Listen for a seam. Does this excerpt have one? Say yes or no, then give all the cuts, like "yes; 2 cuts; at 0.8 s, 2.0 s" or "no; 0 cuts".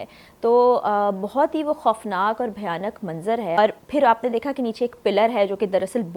yes; 1 cut; at 3.6 s